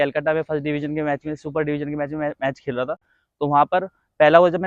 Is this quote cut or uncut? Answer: uncut